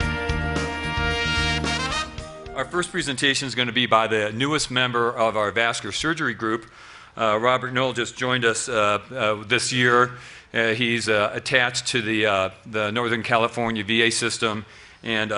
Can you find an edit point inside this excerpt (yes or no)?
no